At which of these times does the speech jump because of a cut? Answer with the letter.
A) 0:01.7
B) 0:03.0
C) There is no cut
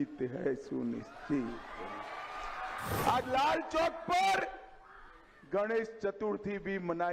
B